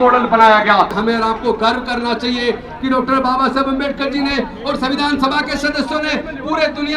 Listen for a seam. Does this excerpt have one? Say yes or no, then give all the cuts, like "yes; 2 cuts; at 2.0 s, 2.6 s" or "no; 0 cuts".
yes; 1 cut; at 1.0 s